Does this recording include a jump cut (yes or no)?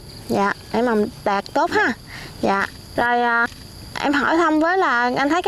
no